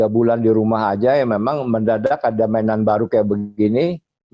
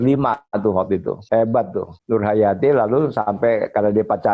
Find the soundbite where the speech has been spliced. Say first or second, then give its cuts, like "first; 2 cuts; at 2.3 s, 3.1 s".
second; 2 cuts; at 1.2 s, 1.9 s